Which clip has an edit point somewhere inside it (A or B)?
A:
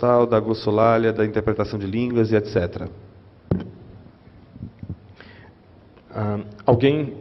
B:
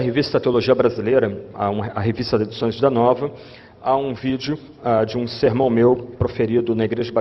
B